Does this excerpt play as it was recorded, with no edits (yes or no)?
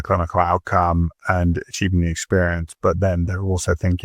yes